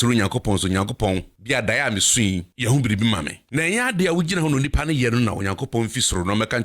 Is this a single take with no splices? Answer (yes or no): no